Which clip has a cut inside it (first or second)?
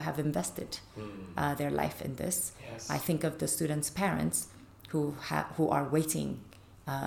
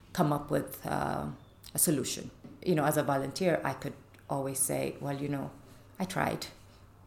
second